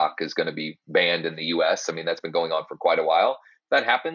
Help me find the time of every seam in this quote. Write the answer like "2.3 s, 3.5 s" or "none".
none